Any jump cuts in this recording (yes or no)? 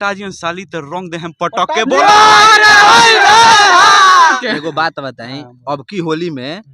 yes